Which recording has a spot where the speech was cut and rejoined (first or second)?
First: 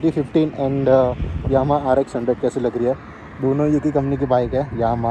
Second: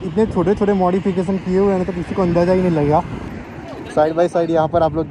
second